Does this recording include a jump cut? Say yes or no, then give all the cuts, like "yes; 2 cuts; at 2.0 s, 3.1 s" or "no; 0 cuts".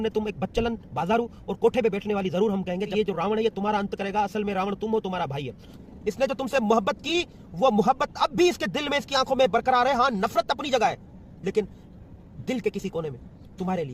yes; 2 cuts; at 2.9 s, 5.7 s